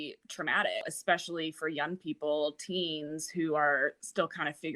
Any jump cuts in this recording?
yes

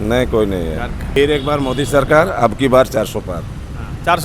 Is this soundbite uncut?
no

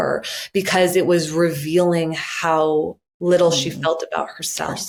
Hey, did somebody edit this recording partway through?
no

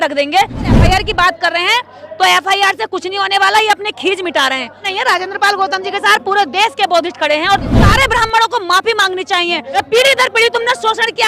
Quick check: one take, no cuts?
no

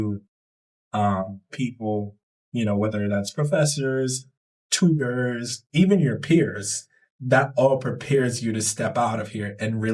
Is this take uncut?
yes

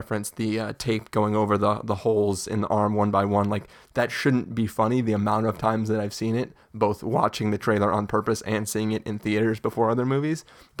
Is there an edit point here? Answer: no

